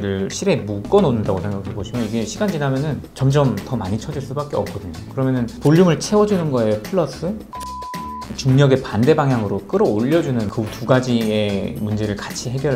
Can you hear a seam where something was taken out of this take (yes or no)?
no